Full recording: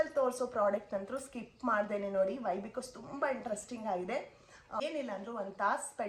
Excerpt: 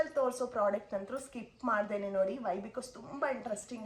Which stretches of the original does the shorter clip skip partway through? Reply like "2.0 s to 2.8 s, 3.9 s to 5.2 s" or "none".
none